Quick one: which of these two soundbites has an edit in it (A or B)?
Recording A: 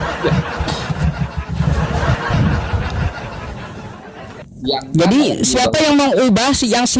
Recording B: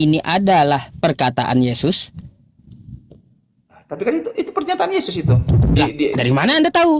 A